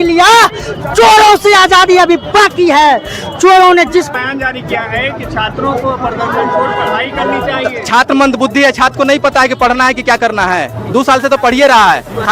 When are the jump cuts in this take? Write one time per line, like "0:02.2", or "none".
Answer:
0:04.1